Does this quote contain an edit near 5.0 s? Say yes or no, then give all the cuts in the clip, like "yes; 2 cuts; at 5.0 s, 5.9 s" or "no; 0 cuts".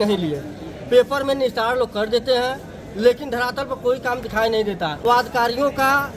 yes; 1 cut; at 5.0 s